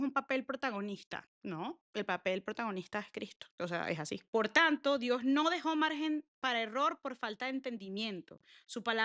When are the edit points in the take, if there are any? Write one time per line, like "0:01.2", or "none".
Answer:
none